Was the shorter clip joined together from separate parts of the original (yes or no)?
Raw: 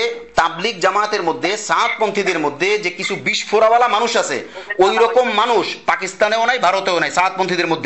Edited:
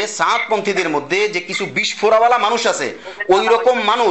no